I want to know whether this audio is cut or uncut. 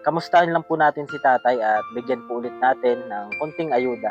uncut